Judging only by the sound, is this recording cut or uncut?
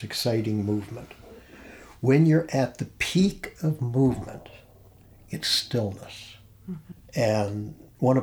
uncut